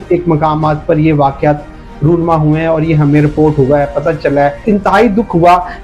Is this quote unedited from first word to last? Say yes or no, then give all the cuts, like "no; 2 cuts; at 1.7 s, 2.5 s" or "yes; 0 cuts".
no; 1 cut; at 4.6 s